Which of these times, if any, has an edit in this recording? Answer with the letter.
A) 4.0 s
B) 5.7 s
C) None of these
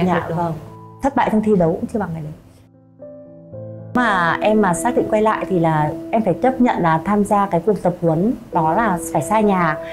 A